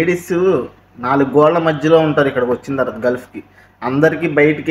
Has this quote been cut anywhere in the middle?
no; 0 cuts

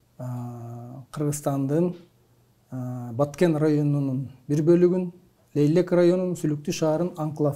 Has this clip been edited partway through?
no; 0 cuts

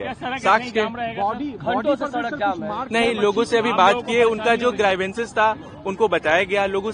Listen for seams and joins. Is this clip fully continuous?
yes; 0 cuts

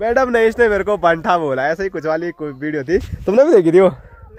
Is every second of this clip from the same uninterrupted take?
yes; 0 cuts

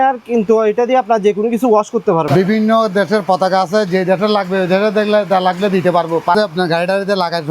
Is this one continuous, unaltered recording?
no; 2 cuts; at 2.3 s, 6.3 s

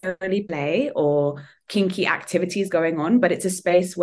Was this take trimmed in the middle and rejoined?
no; 0 cuts

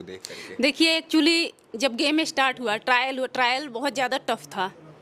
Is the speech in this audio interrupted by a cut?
no; 0 cuts

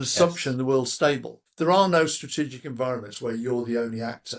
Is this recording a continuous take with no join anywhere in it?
no; 1 cut; at 1.4 s

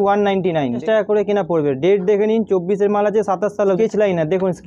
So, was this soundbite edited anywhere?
yes; 2 cuts; at 0.8 s, 3.8 s

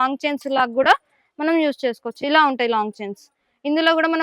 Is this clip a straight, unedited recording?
yes; 0 cuts

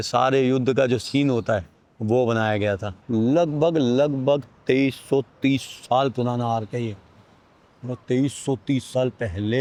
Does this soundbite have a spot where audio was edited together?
no; 0 cuts

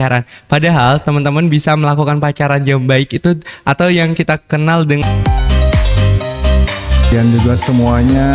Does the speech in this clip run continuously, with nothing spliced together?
no; 1 cut; at 5.0 s

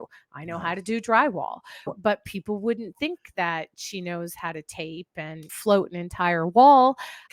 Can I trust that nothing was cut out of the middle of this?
yes; 0 cuts

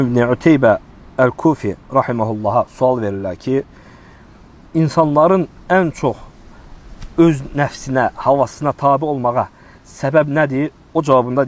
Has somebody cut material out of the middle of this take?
no; 0 cuts

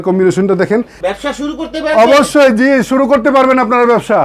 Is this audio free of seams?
no; 1 cut; at 1.0 s

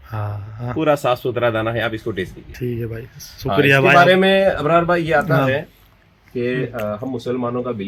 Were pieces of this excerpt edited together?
no; 0 cuts

